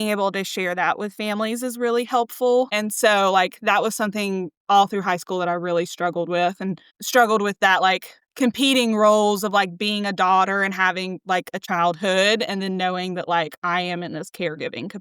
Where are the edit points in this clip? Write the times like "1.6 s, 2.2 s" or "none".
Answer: 2.7 s, 11.6 s